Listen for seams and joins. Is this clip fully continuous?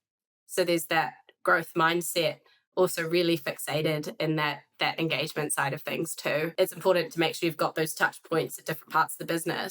no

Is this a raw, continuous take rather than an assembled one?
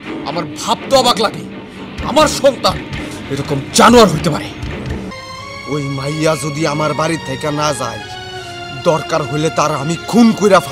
no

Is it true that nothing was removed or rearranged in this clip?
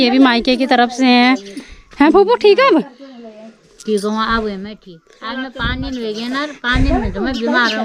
yes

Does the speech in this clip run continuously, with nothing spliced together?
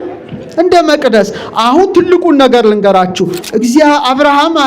no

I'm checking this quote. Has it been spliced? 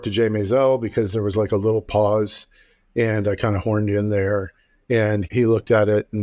no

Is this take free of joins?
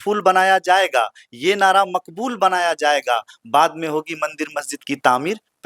yes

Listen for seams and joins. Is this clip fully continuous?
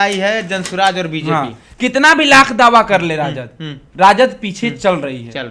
yes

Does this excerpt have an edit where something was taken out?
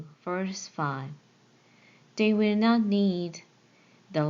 no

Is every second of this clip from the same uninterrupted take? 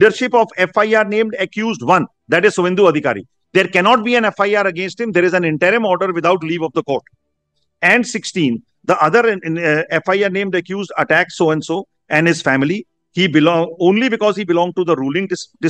yes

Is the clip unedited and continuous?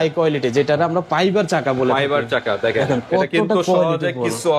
yes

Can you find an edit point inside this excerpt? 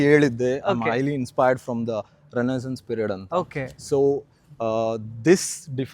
no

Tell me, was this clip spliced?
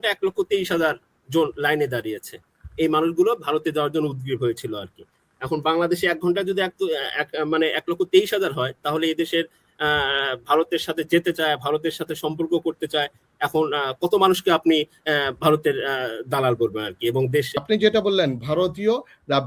yes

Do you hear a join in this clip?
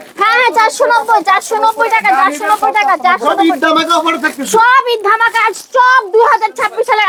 no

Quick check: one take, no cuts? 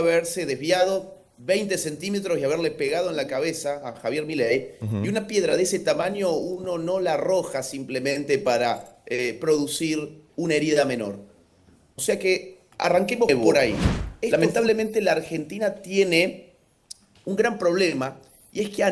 no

